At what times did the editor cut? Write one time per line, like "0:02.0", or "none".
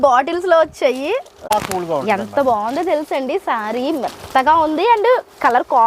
0:01.5

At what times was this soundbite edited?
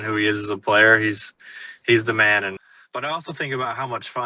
0:02.6

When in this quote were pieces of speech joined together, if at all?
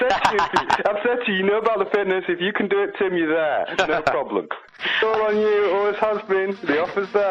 0:04.8

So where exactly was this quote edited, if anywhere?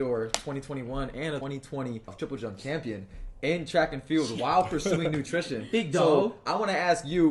0:02.1
0:04.3

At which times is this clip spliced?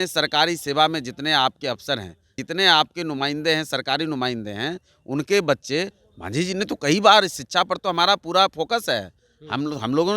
0:02.3
0:06.0

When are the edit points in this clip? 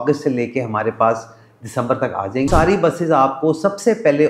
0:02.5

